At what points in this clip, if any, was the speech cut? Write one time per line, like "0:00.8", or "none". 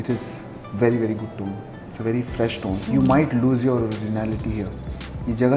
0:02.8